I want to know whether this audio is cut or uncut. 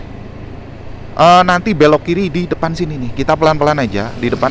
uncut